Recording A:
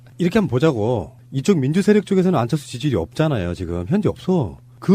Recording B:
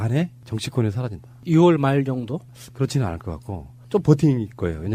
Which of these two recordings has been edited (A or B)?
A